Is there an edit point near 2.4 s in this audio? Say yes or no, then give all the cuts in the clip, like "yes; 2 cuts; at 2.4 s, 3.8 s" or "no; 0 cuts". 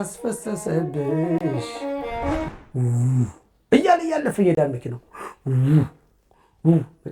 yes; 1 cut; at 2.4 s